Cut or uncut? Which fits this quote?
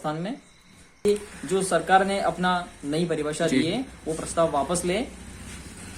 cut